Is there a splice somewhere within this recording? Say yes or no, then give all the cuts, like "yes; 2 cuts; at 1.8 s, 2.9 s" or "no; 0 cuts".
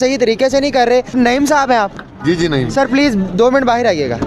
yes; 1 cut; at 1.2 s